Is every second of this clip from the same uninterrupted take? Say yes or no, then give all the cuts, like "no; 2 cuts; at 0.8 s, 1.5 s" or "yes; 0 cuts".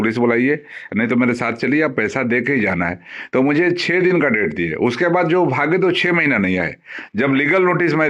yes; 0 cuts